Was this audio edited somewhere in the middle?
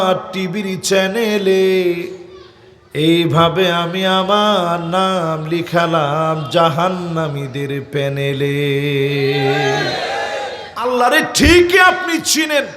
yes; 1 cut; at 10.9 s

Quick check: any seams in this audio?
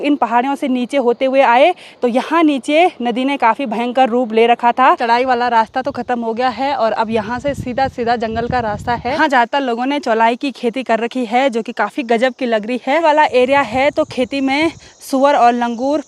yes; 3 cuts; at 5.0 s, 9.2 s, 13.0 s

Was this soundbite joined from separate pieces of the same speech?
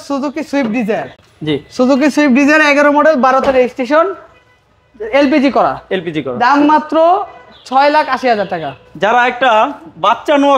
no; 0 cuts

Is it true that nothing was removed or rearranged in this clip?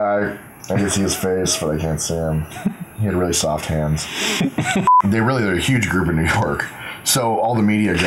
no; 1 cut; at 4.9 s

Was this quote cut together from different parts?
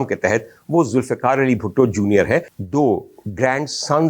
yes; 1 cut; at 2.5 s

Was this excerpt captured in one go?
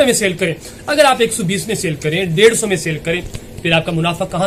yes; 0 cuts

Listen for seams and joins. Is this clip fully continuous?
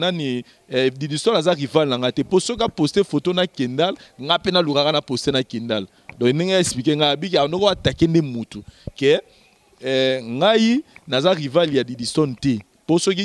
yes; 0 cuts

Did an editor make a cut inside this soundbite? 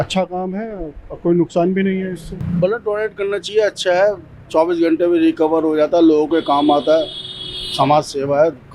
yes; 1 cut; at 2.4 s

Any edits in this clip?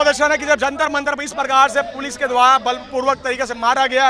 no; 0 cuts

